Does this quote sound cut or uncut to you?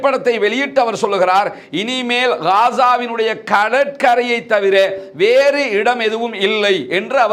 uncut